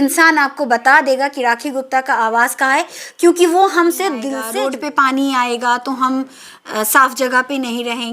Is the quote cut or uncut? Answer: cut